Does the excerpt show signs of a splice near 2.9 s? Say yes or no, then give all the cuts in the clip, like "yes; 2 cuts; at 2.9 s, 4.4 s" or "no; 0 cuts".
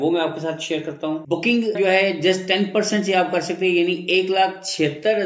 no; 1 cut; at 1.2 s